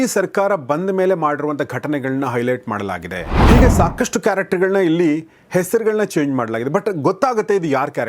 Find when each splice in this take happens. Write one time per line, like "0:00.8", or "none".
0:03.4